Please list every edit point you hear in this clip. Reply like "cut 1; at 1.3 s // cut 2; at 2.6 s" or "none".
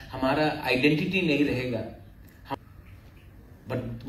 cut 1; at 2.5 s